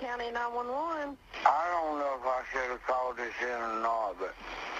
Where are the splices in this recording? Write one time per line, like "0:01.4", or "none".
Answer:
0:01.2

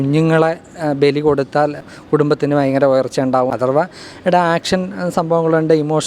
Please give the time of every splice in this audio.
0:01.5
0:03.4

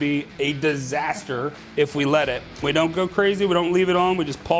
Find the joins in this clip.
0:02.5

